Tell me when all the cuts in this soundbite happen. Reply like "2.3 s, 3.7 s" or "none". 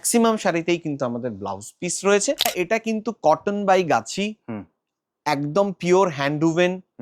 2.5 s